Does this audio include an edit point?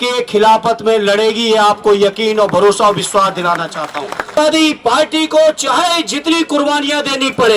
yes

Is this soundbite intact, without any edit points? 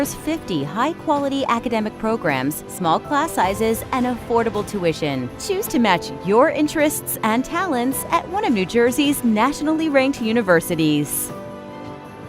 no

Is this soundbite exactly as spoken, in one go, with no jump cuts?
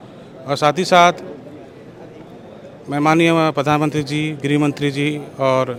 yes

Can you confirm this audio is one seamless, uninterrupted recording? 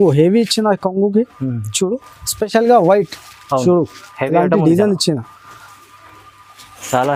yes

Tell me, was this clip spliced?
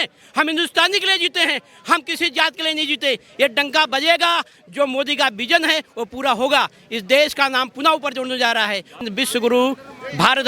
yes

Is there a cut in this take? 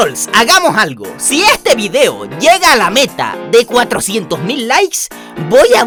no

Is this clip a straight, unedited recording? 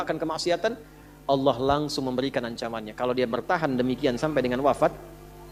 yes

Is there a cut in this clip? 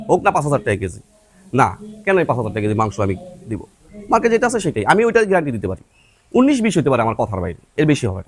no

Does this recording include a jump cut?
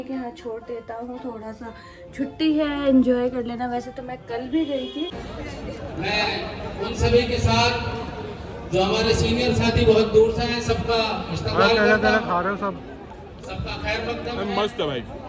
yes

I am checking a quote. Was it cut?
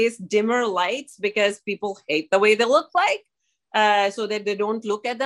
no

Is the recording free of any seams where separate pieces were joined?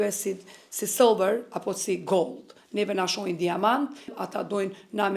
no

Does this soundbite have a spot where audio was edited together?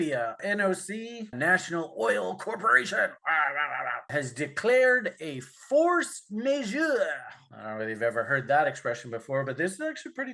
no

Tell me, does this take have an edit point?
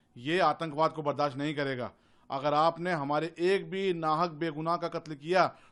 no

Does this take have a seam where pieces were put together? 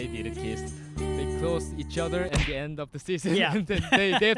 no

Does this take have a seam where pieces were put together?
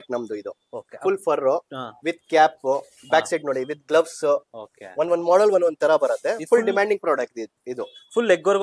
no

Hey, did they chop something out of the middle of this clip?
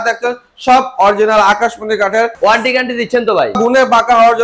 yes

